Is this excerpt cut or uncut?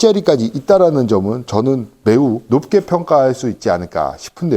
cut